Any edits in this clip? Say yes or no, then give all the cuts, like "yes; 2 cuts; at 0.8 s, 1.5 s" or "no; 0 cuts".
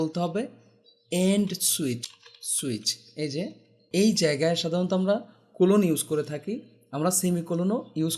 yes; 2 cuts; at 2.0 s, 3.8 s